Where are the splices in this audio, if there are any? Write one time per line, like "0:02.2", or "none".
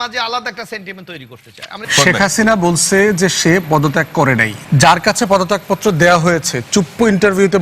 0:01.8
0:04.5

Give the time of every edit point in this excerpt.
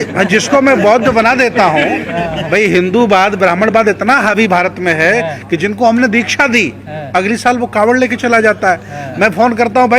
none

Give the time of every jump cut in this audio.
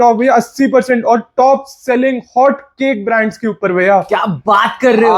none

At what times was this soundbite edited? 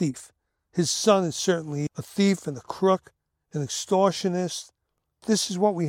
0:01.8

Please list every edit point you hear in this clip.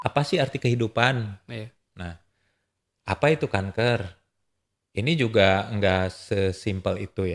none

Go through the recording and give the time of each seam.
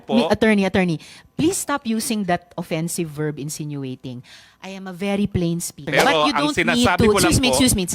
0:05.8

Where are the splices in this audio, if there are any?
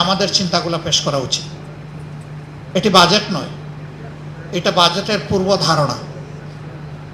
none

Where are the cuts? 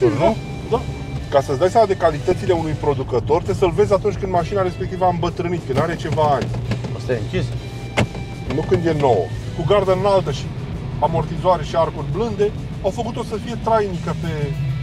0:01.2
0:09.5

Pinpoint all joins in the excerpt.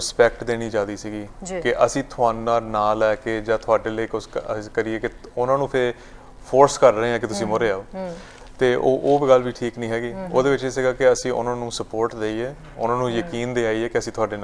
none

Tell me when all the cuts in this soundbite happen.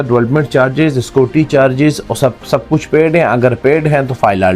none

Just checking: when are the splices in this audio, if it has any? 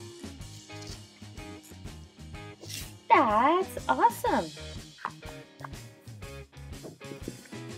none

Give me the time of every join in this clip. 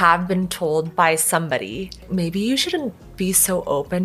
0:02.0

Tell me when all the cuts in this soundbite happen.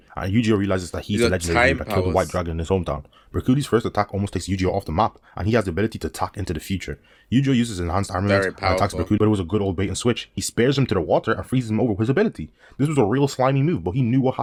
none

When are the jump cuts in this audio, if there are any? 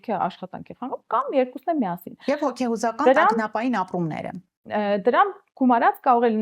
none

